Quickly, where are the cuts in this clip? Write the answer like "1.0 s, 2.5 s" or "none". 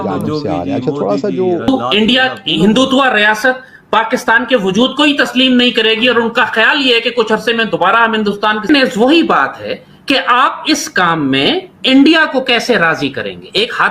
1.7 s, 8.6 s